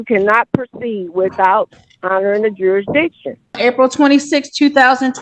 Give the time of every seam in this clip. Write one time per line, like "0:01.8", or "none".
0:03.6